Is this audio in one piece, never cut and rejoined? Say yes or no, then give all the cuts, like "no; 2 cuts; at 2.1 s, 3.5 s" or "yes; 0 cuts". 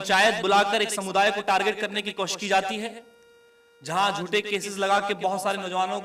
yes; 0 cuts